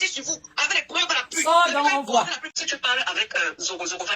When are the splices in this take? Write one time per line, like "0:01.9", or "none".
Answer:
0:02.6